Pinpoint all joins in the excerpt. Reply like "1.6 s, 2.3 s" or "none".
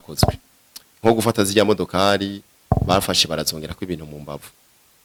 none